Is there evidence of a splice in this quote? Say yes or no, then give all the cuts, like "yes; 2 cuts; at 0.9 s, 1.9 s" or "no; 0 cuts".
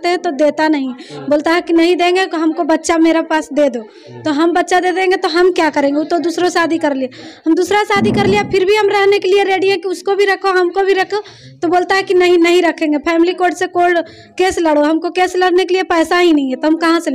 no; 0 cuts